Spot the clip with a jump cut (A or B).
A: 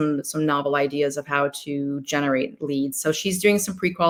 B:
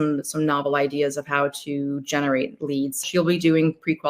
B